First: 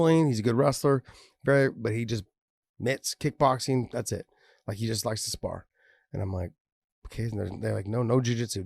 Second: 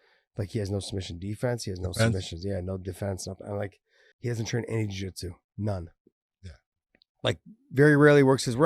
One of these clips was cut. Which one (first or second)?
second